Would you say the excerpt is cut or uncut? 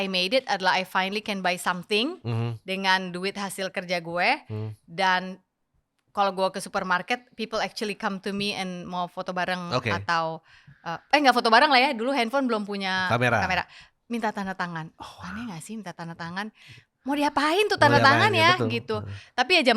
uncut